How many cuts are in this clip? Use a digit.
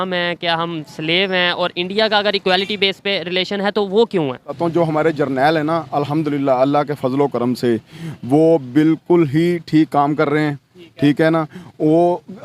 1